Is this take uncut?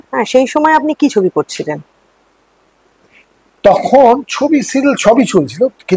yes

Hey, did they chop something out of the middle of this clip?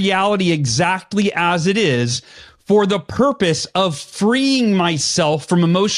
no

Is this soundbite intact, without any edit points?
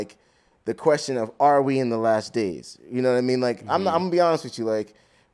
yes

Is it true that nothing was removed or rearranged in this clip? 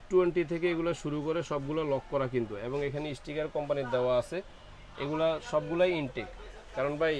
yes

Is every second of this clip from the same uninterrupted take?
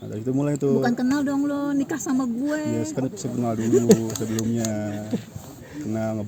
yes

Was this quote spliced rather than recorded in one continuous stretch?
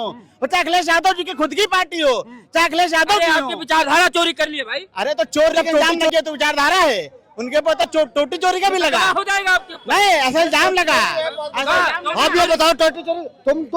yes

